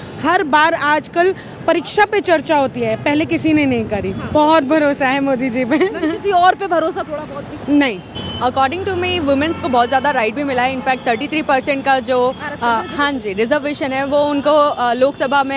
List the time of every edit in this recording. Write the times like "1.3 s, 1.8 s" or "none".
4.2 s, 8.1 s